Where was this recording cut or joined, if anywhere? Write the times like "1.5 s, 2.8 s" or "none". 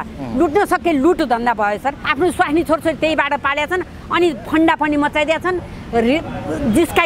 2.0 s